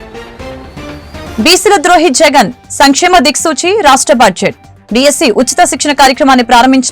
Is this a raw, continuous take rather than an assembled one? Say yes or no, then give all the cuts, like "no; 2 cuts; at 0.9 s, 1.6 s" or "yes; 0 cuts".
no; 1 cut; at 1.2 s